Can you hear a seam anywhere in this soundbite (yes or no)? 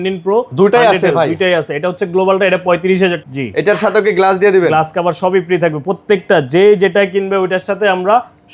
yes